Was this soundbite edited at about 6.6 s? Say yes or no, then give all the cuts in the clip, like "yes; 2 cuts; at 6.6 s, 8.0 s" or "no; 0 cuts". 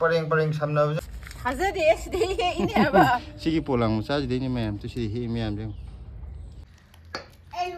yes; 2 cuts; at 1.0 s, 6.6 s